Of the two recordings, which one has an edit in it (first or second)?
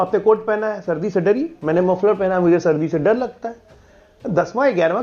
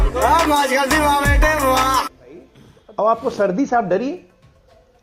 second